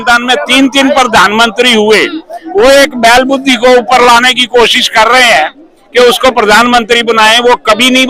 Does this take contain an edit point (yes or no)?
no